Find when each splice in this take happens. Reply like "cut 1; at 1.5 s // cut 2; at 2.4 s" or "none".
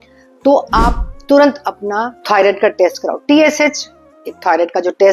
cut 1; at 2.2 s